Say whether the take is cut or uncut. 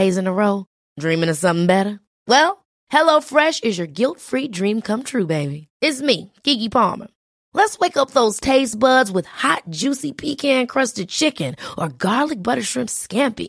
uncut